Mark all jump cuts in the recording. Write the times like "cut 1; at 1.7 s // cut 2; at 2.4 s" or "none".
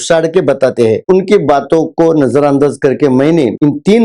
cut 1; at 1.0 s